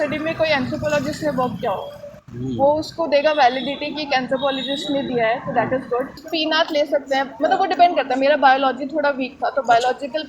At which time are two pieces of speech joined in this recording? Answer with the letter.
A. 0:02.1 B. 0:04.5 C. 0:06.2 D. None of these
C